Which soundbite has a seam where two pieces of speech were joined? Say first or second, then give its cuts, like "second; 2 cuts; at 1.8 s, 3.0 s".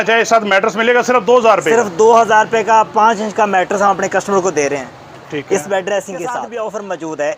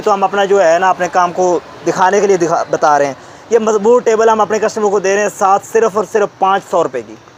first; 1 cut; at 6.5 s